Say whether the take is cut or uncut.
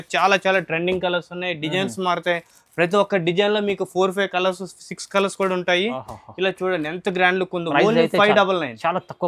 uncut